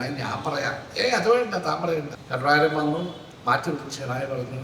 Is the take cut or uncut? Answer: cut